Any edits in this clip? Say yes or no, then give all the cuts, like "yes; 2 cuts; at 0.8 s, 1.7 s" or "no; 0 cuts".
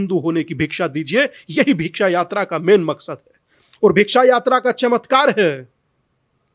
no; 0 cuts